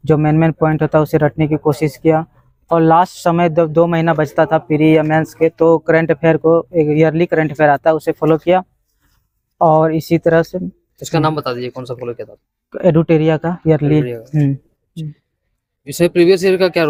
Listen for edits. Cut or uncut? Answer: uncut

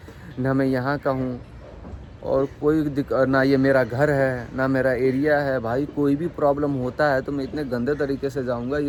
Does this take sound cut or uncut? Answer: uncut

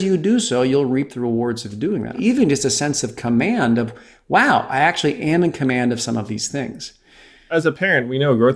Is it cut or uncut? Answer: cut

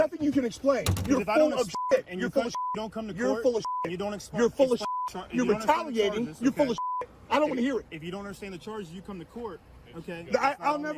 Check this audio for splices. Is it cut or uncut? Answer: uncut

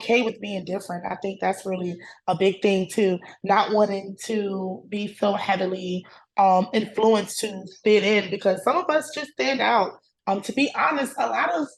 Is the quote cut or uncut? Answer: cut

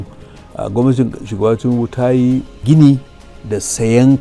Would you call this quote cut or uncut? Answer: uncut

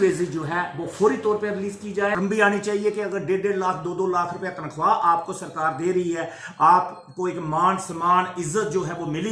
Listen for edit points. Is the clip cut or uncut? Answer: cut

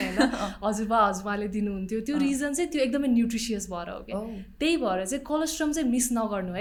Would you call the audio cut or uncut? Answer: uncut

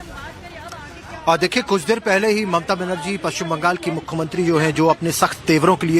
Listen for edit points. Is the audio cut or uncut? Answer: cut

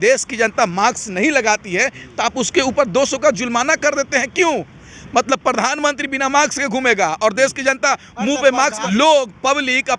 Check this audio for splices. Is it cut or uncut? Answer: cut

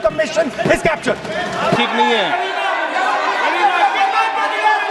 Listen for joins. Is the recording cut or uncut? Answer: cut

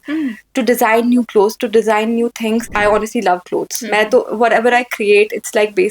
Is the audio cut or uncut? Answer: cut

